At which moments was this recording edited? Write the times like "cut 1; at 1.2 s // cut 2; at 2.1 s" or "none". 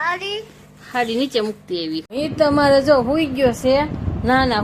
cut 1; at 2.1 s